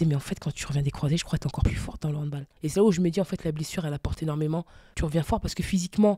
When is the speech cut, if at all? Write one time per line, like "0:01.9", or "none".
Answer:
0:02.0
0:04.8